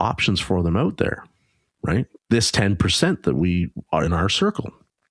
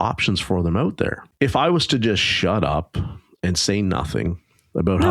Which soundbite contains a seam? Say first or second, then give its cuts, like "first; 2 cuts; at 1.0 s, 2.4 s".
second; 1 cut; at 1.2 s